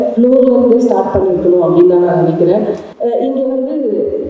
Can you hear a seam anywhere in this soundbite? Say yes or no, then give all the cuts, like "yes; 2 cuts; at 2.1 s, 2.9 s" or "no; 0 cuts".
yes; 1 cut; at 2.9 s